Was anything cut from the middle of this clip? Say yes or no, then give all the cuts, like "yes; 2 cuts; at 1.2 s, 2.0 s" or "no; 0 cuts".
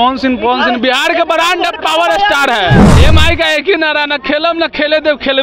yes; 1 cut; at 2.9 s